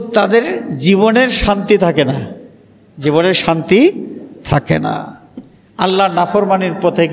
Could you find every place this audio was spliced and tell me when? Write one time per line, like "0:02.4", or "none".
none